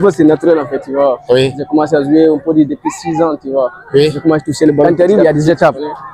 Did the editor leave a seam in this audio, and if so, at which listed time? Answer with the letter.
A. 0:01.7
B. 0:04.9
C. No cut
B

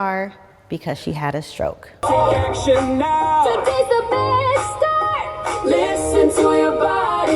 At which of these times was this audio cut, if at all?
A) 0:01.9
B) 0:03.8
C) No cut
A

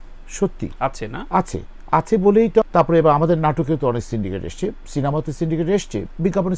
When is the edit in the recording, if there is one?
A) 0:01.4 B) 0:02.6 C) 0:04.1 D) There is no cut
B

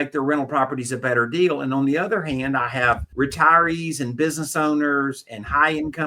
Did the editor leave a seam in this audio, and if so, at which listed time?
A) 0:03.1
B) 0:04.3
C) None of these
A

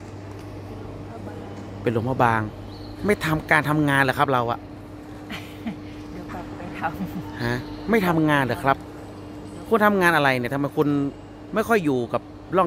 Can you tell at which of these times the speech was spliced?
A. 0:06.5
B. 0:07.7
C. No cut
C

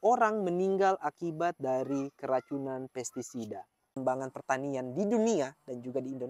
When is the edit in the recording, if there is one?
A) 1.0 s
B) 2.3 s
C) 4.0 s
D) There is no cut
C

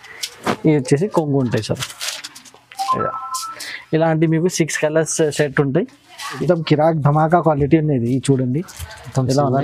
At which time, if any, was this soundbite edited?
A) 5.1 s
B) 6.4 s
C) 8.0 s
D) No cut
B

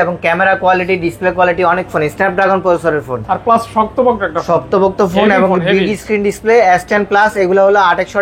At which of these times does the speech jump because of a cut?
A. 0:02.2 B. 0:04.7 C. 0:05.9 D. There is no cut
D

